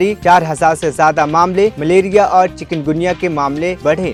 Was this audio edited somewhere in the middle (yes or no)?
no